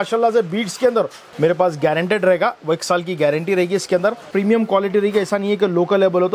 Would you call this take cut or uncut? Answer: cut